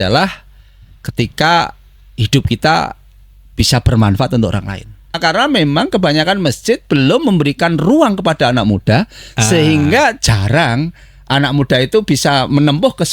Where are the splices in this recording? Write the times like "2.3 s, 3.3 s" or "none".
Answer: 5.2 s